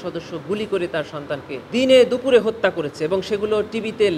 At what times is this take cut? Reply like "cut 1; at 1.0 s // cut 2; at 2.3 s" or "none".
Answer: cut 1; at 1.6 s